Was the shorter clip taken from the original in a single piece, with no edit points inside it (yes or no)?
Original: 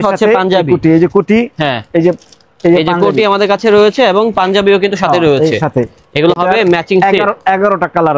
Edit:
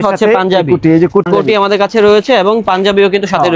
no